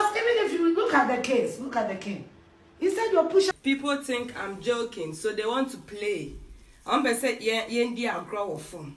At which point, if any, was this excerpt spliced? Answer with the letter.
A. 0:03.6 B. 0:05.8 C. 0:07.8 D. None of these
A